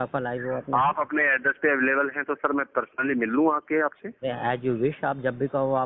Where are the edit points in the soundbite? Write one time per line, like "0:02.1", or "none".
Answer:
none